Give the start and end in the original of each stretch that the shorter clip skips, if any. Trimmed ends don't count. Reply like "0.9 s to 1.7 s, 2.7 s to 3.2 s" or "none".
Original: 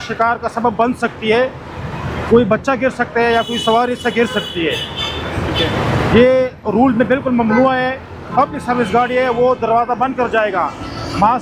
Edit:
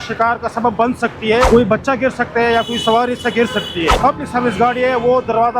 1.5 s to 2.3 s, 4.8 s to 8.3 s